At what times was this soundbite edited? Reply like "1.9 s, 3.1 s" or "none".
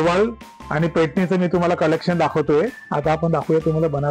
2.8 s